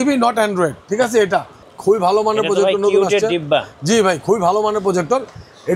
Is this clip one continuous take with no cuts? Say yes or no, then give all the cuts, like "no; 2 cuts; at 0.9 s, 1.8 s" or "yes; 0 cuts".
no; 1 cut; at 1.6 s